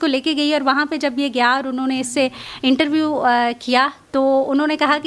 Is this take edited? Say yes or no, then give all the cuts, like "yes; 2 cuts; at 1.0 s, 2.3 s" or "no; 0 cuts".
no; 0 cuts